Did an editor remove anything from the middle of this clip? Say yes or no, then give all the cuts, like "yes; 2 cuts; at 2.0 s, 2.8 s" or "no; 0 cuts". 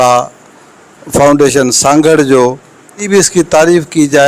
yes; 1 cut; at 3.0 s